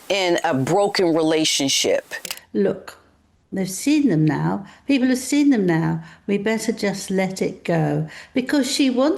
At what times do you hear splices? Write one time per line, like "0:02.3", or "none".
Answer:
0:02.2